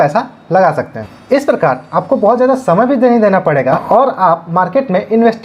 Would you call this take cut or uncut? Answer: cut